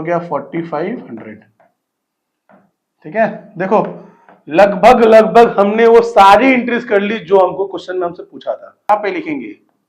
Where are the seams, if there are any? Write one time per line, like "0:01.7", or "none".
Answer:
0:08.9